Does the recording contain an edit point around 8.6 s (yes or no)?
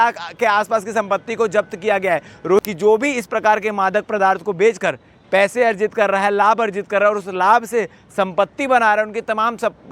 no